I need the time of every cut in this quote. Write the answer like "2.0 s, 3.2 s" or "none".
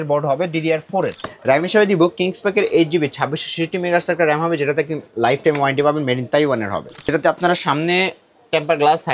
1.3 s, 6.9 s